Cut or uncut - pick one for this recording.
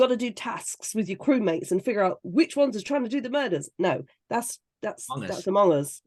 uncut